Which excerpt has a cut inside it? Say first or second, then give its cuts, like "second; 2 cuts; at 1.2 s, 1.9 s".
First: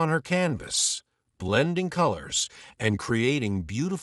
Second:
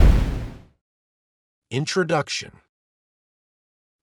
second; 1 cut; at 1.1 s